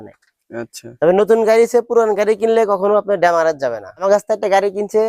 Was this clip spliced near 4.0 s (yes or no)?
yes